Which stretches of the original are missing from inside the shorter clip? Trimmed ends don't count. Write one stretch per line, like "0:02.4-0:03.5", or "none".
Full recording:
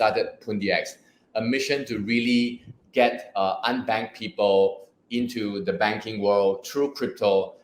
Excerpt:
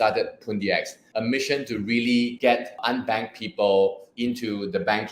0:01.0-0:01.2
0:02.9-0:03.5
0:04.9-0:05.0